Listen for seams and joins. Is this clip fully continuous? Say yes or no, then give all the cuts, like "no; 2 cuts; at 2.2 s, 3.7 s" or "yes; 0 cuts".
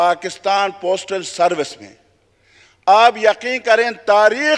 yes; 0 cuts